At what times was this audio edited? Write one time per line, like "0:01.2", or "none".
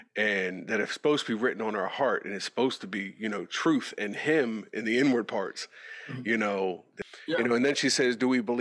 0:06.9

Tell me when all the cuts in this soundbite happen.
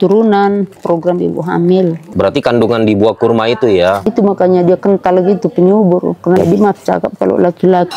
0:00.8
0:02.0
0:04.1
0:06.4

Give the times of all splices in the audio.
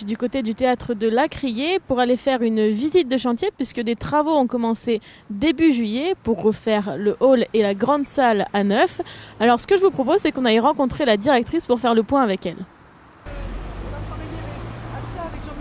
none

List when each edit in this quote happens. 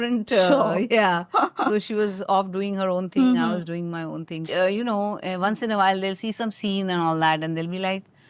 0:04.4

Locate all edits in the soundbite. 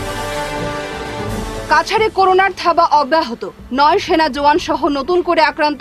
0:01.1

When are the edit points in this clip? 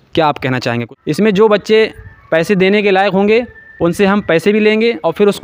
0:00.9

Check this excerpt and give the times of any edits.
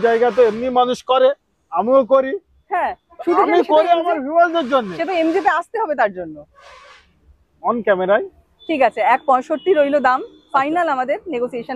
none

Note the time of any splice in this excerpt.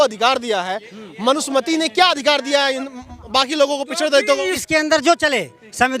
0:04.6

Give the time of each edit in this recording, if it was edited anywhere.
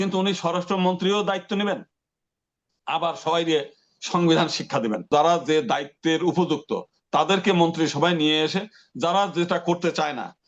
0:05.1

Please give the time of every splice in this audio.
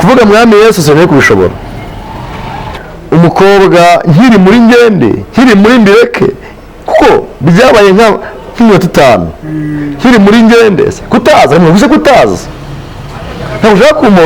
0:02.8

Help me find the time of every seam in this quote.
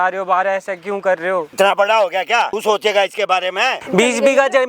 0:01.5
0:02.5
0:03.8

